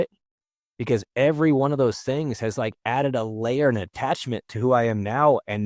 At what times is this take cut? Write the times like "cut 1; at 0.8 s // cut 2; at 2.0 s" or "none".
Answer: none